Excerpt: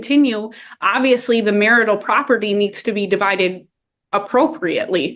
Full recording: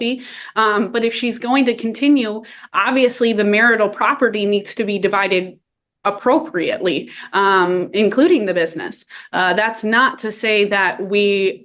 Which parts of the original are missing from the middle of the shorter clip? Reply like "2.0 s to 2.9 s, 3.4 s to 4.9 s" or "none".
none